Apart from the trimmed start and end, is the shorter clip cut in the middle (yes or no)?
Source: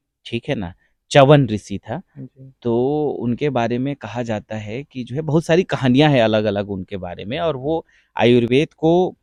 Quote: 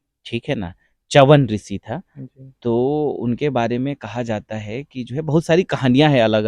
no